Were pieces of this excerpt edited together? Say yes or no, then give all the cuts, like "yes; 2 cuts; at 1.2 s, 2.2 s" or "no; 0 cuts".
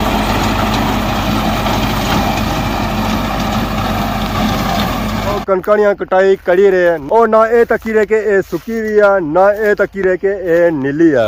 no; 0 cuts